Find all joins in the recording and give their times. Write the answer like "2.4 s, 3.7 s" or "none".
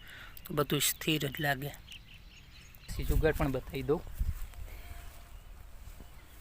3.0 s